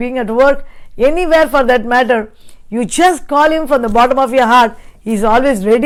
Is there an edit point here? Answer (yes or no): no